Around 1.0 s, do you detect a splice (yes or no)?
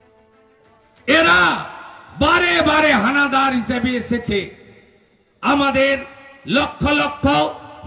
yes